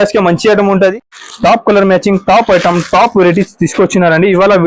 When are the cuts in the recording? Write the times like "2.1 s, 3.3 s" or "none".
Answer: 1.1 s